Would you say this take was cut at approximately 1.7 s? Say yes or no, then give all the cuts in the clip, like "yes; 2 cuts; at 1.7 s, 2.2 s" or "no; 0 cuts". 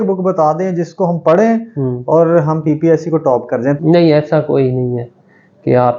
no; 1 cut; at 3.8 s